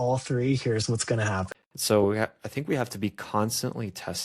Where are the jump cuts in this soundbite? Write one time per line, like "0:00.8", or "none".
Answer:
0:01.5